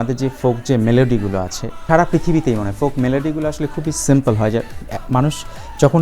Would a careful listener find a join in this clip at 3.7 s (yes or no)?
no